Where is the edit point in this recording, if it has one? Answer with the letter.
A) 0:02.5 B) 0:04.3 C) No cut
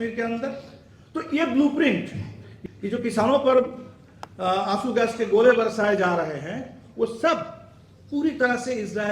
A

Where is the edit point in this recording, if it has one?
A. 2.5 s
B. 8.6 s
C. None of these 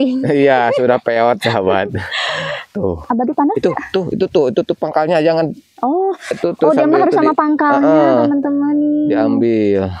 C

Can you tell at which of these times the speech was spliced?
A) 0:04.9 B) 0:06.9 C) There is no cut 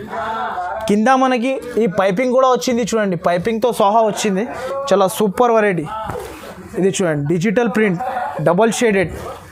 C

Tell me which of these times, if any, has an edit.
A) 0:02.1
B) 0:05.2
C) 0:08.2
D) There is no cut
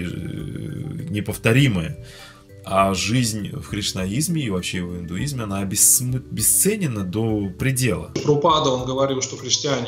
C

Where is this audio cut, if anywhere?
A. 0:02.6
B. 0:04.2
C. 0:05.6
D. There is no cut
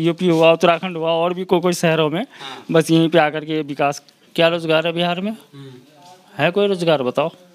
B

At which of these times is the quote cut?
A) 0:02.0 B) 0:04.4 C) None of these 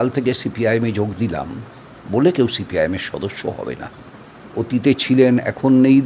B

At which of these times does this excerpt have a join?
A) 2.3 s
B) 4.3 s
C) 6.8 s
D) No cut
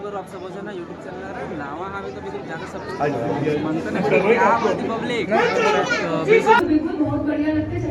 C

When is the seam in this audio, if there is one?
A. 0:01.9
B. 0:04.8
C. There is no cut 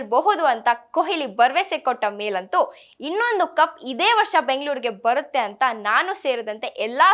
C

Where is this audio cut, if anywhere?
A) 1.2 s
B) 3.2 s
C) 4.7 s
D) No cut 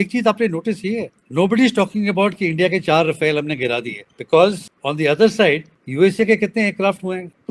D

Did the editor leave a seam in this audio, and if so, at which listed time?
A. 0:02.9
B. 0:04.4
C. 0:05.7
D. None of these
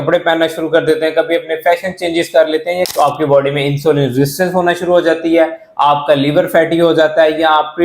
A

